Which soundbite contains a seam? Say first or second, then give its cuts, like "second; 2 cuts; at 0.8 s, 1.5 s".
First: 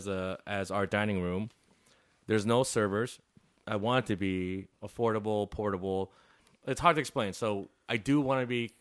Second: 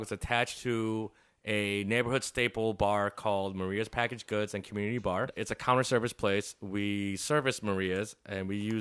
second; 1 cut; at 5.4 s